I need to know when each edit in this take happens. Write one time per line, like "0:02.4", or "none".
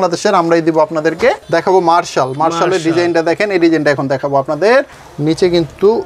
0:01.4
0:05.0